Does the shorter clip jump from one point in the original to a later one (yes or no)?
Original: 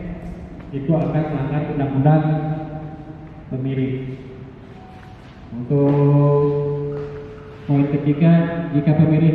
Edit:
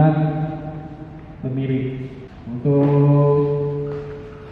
yes